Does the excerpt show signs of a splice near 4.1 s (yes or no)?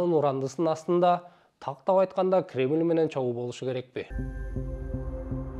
yes